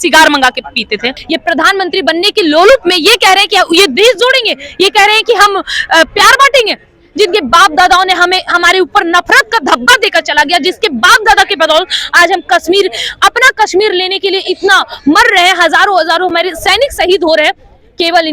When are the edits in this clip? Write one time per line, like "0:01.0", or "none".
0:01.2